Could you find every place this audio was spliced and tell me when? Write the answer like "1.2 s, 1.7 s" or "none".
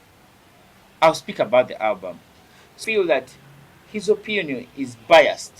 2.7 s